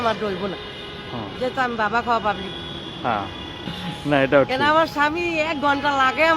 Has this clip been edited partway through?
yes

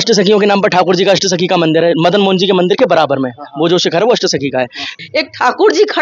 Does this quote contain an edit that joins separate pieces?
yes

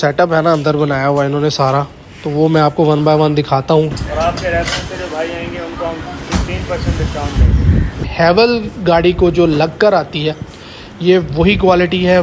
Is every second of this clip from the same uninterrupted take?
no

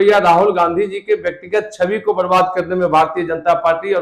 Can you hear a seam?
no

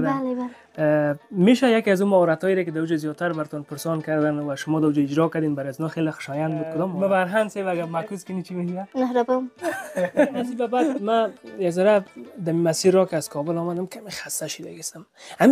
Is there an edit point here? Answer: yes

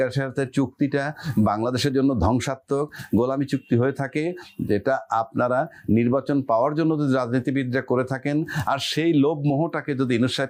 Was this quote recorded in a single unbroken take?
yes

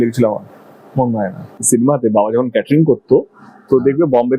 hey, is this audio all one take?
no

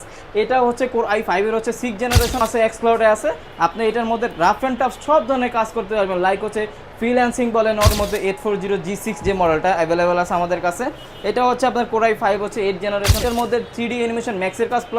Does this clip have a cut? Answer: yes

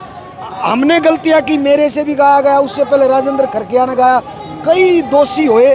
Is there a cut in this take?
no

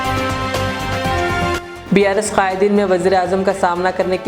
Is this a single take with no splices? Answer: no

